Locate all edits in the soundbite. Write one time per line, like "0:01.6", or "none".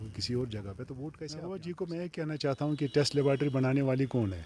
0:01.2